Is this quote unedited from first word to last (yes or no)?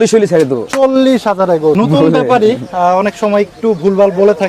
no